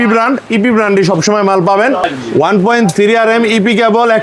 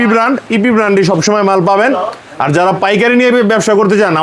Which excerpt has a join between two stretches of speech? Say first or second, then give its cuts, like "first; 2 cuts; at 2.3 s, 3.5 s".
first; 1 cut; at 2.0 s